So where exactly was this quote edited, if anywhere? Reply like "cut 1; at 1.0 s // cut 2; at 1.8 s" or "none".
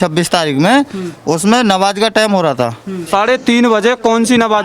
cut 1; at 3.0 s